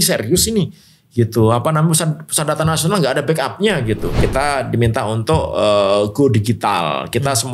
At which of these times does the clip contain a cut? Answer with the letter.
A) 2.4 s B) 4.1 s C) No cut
B